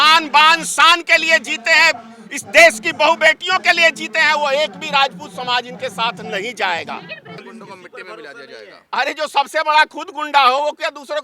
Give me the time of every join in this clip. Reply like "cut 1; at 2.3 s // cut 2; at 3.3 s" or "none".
cut 1; at 7.4 s